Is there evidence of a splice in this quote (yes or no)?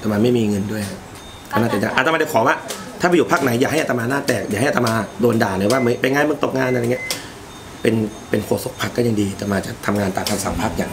no